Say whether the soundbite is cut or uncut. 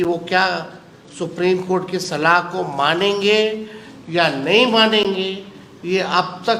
uncut